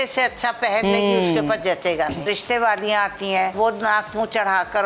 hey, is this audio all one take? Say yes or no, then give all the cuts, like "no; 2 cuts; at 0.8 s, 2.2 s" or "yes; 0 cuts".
no; 2 cuts; at 2.3 s, 3.5 s